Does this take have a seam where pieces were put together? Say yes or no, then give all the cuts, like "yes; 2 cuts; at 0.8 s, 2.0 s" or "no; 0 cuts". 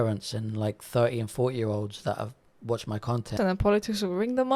yes; 1 cut; at 3.3 s